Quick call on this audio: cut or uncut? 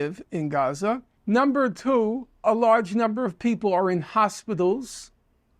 cut